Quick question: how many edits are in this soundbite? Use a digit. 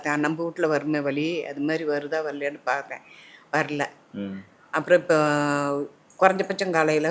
0